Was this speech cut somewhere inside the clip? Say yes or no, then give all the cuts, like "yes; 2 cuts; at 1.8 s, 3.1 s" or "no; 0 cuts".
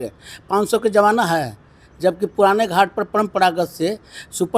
no; 0 cuts